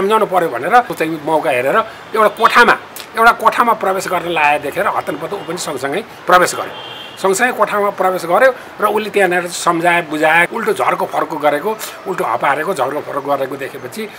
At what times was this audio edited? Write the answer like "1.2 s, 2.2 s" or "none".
0.9 s, 10.5 s